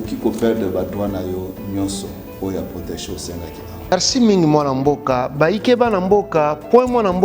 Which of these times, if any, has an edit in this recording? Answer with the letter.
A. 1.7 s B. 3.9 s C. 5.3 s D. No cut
B